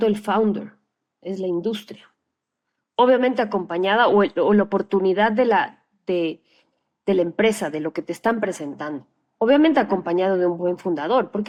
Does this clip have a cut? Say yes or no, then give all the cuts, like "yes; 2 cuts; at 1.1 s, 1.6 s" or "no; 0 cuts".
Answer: no; 0 cuts